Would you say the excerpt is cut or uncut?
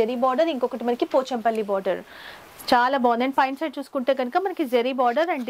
uncut